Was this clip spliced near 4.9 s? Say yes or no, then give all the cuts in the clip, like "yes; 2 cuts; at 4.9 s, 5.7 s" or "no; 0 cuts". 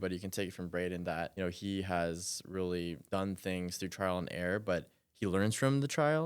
no; 2 cuts; at 1.3 s, 3.0 s